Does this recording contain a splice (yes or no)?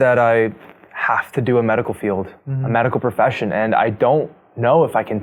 no